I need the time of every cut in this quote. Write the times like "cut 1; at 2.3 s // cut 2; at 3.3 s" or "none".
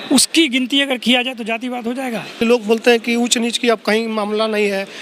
cut 1; at 2.4 s